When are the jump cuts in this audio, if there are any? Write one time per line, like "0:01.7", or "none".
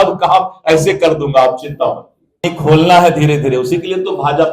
0:02.4